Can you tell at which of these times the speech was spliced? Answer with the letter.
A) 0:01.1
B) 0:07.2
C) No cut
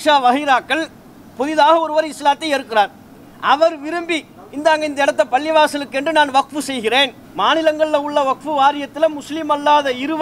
B